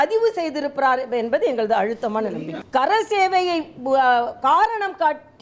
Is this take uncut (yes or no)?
no